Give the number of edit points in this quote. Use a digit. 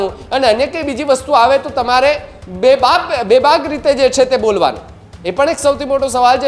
0